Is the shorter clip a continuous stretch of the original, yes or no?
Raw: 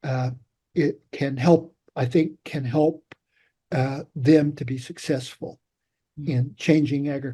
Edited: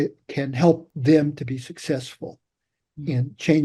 no